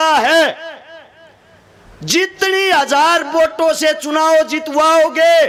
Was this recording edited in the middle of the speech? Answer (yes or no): no